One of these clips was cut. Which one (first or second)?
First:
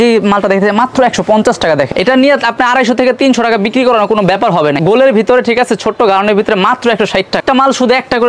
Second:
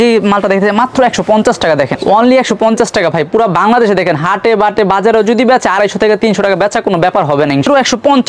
first